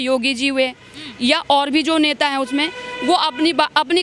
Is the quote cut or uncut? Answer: uncut